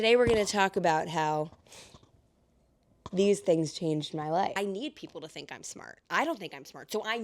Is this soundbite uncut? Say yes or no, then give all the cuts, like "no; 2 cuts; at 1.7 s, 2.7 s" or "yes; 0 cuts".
no; 1 cut; at 4.5 s